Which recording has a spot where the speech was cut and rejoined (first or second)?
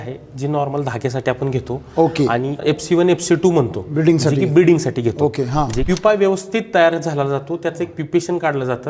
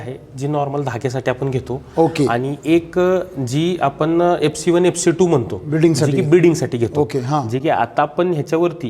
first